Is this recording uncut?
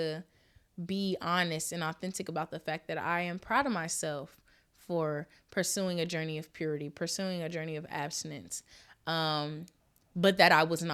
yes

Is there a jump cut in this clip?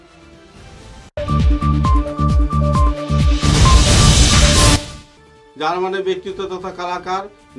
yes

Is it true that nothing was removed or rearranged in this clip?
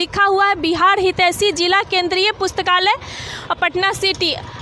yes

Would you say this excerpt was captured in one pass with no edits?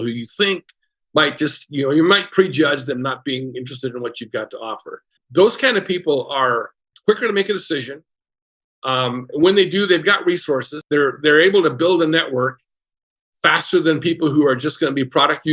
no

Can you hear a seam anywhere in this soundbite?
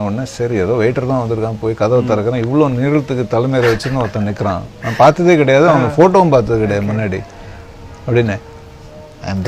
no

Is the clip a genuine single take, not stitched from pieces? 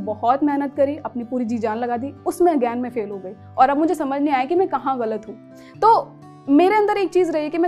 yes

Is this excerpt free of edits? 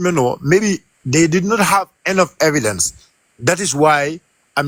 yes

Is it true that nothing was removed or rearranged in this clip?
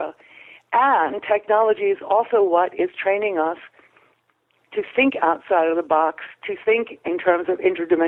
yes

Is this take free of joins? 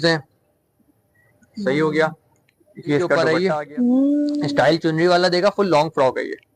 no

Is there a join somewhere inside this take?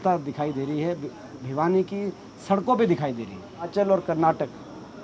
yes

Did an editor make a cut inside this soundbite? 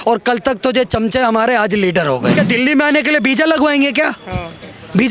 yes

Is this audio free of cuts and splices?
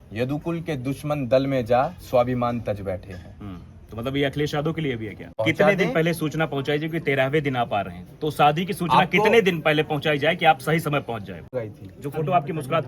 no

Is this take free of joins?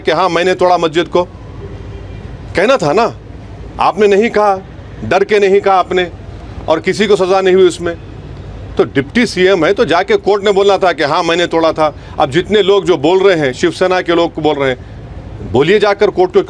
yes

